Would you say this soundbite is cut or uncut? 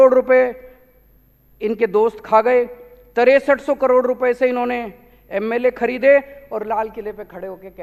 uncut